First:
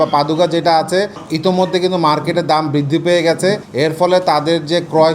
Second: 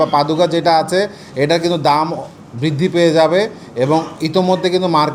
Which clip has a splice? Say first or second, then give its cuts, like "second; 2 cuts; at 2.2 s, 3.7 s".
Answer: first; 2 cuts; at 1.2 s, 3.7 s